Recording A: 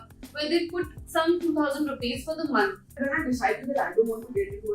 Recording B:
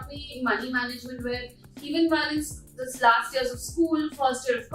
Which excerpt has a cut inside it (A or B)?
A